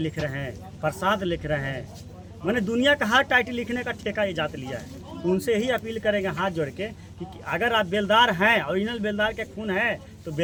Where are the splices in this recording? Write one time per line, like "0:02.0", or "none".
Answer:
none

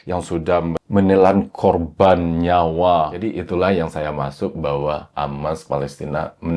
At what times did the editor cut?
0:03.3

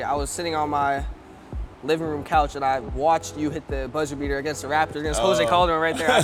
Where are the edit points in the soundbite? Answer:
none

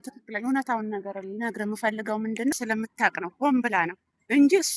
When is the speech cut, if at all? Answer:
0:02.5

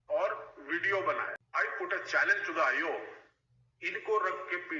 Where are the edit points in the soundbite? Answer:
0:01.4

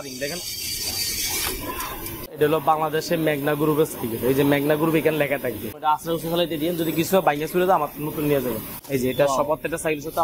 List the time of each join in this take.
0:02.3
0:05.8
0:08.7

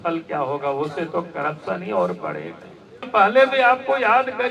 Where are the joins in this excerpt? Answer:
0:03.1

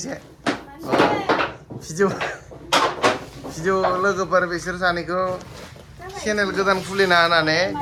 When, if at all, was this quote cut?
none

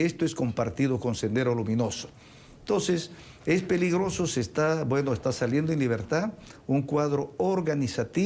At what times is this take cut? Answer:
none

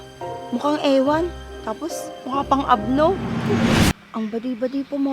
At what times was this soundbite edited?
0:03.9

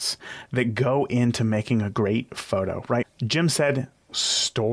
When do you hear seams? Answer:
0:03.1

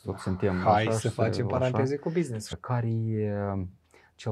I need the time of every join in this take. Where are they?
0:02.5

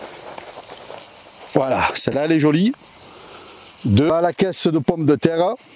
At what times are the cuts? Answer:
0:04.1

